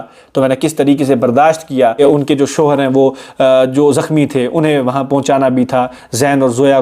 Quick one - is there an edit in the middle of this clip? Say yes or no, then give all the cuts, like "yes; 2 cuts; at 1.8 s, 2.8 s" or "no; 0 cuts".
yes; 1 cut; at 2.0 s